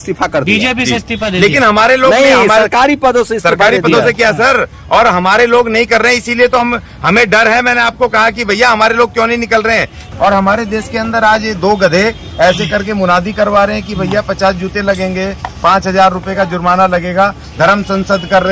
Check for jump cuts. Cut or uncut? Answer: cut